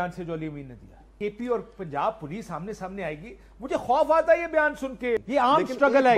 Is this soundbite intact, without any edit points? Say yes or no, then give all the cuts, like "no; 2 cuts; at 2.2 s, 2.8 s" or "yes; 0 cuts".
no; 2 cuts; at 1.1 s, 5.2 s